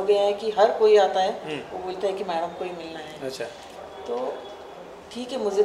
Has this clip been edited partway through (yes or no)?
no